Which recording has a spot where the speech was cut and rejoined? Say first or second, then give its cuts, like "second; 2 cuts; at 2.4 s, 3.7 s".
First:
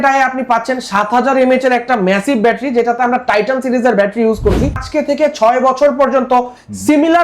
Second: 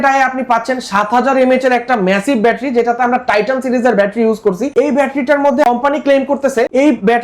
first; 1 cut; at 4.7 s